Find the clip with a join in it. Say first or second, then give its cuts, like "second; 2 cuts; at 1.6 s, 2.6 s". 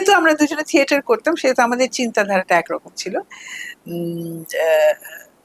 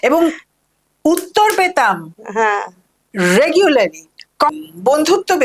second; 1 cut; at 4.5 s